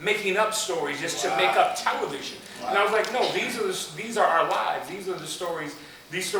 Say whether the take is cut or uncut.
uncut